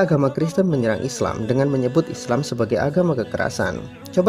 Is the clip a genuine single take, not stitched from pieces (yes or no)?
yes